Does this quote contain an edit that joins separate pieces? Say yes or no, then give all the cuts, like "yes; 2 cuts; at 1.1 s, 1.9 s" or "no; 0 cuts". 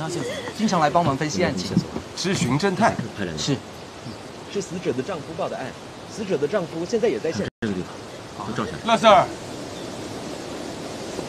no; 0 cuts